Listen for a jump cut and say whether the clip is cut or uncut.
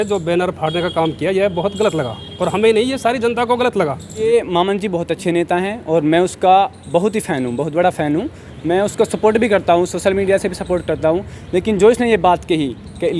cut